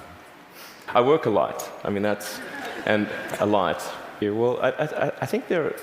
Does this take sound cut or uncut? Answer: cut